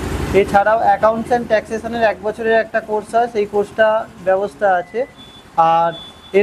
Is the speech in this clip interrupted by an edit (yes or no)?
no